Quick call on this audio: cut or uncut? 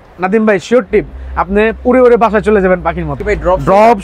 cut